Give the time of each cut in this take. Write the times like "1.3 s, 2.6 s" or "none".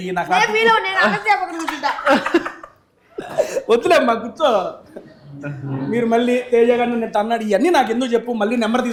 none